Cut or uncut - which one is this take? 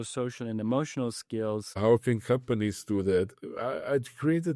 cut